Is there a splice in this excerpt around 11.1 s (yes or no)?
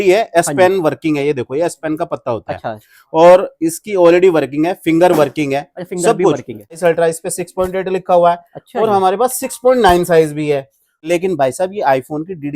yes